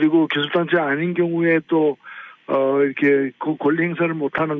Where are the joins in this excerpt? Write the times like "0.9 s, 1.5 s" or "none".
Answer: 1.3 s